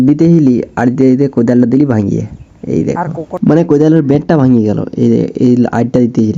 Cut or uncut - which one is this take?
uncut